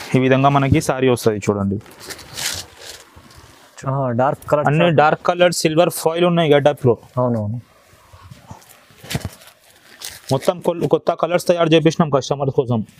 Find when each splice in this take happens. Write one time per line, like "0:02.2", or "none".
0:03.6